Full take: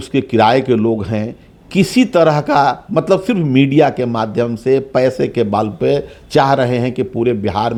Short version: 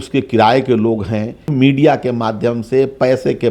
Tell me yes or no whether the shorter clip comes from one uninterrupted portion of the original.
no